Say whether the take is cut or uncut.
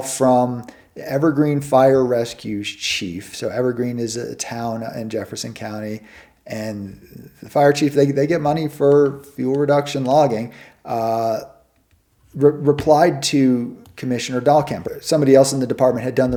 uncut